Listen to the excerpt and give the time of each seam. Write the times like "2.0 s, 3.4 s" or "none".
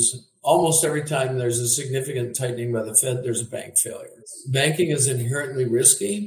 none